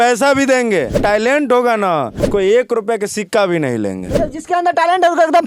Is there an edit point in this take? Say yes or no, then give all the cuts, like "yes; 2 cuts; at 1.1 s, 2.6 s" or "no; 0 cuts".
yes; 2 cuts; at 1.0 s, 2.2 s